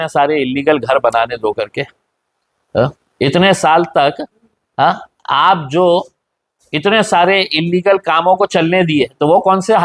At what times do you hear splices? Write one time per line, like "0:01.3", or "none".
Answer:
none